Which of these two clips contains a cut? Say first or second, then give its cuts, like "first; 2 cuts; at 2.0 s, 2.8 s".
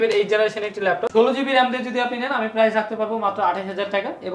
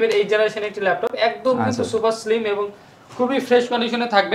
first; 1 cut; at 1.1 s